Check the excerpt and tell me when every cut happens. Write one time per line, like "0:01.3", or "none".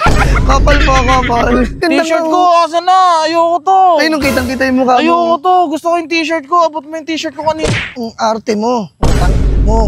0:01.8